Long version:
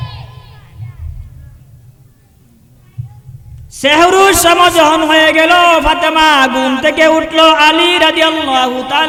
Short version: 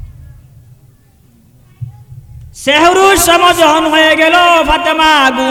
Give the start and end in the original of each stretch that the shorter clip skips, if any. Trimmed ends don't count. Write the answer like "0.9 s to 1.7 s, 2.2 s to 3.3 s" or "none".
none